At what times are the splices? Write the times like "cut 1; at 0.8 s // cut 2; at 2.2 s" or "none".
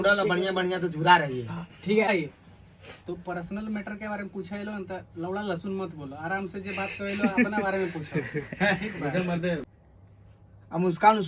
cut 1; at 2.1 s // cut 2; at 9.8 s